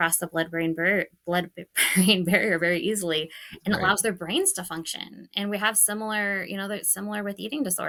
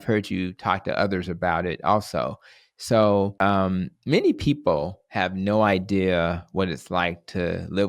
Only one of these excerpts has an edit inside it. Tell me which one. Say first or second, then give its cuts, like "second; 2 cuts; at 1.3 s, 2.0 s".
second; 1 cut; at 3.3 s